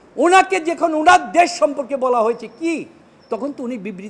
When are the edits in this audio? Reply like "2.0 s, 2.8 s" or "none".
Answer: none